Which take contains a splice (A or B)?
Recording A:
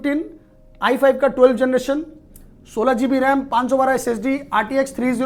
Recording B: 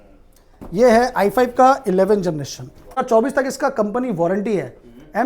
B